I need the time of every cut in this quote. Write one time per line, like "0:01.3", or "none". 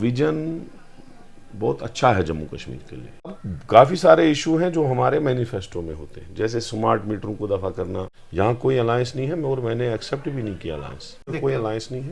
0:03.5
0:08.2
0:11.3